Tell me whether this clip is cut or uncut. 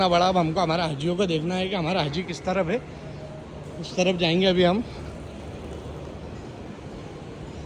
uncut